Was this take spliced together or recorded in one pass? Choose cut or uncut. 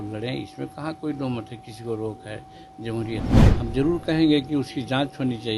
cut